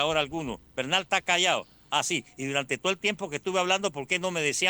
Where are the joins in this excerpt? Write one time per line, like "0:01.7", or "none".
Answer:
none